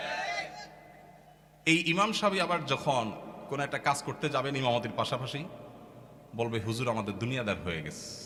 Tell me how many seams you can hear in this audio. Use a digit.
0